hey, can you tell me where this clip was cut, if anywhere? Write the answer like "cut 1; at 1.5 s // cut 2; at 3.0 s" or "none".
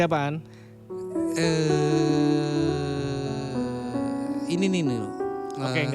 none